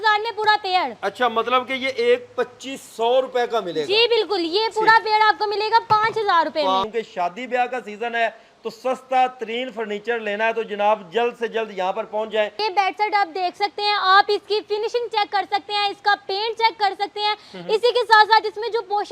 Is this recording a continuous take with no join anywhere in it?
no; 2 cuts; at 6.8 s, 12.6 s

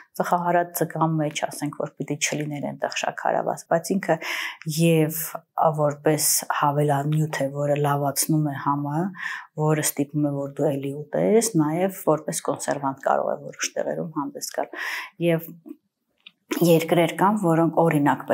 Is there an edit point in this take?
no; 0 cuts

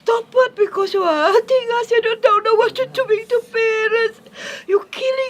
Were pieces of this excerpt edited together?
yes; 1 cut; at 1.4 s

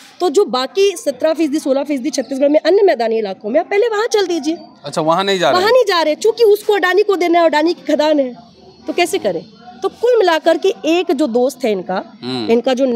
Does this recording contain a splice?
no; 0 cuts

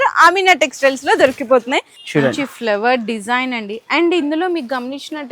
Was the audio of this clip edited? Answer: yes; 1 cut; at 2.0 s

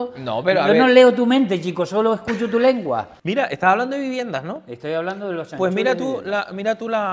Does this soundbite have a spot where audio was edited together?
yes; 1 cut; at 3.1 s

